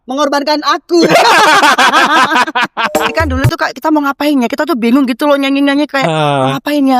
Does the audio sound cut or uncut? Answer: cut